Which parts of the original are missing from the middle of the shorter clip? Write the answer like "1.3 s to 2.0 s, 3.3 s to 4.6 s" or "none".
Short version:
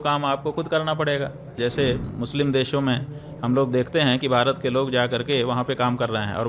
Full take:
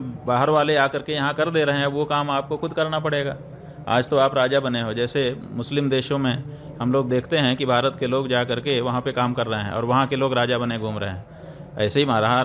3.6 s to 4.9 s